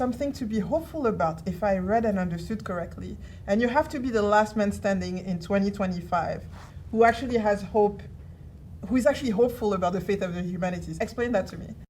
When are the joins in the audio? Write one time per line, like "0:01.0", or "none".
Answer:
0:10.9